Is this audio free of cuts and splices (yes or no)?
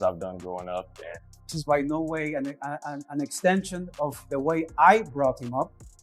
no